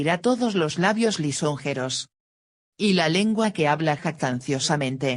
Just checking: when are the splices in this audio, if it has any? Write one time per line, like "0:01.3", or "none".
0:01.3